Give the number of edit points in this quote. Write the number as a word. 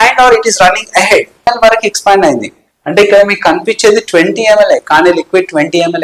one